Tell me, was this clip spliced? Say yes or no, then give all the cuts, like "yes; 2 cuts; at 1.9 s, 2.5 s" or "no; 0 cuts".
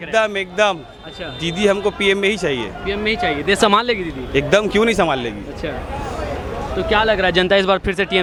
no; 0 cuts